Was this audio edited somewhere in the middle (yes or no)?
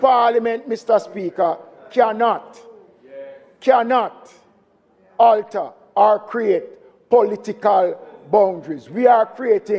no